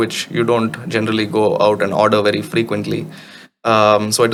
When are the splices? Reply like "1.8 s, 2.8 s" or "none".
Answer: none

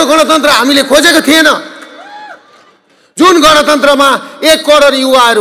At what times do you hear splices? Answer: none

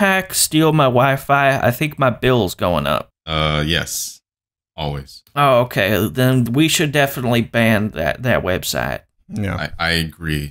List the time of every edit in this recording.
3.2 s

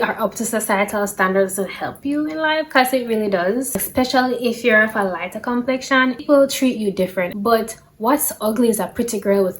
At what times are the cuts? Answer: 3.8 s, 6.2 s, 7.3 s

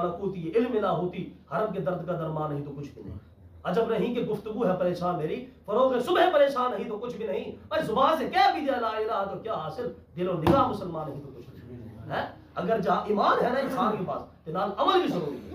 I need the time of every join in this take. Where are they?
none

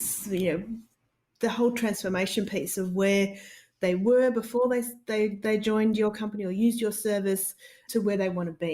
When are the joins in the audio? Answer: 7.8 s

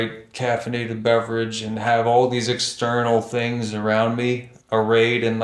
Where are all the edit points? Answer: none

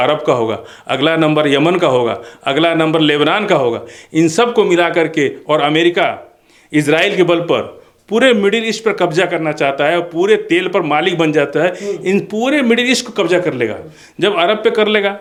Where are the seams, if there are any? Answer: none

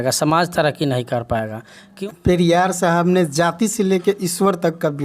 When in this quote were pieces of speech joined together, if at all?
1.8 s

